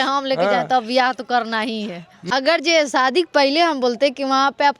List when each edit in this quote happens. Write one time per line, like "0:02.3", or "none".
0:02.2